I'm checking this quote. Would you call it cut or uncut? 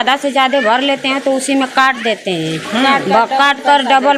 uncut